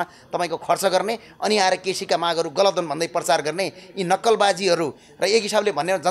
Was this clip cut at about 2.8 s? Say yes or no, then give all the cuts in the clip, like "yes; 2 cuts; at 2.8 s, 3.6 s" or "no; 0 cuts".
no; 0 cuts